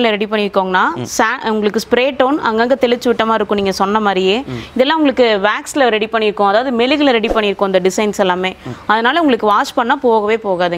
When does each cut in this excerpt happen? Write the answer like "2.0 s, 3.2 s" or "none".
none